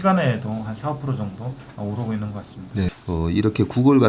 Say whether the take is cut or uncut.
cut